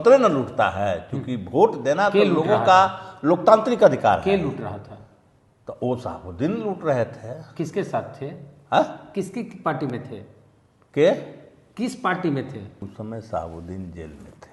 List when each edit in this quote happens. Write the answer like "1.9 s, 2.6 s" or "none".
12.9 s